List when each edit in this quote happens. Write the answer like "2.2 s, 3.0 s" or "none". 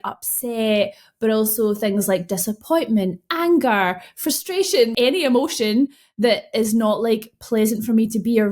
4.9 s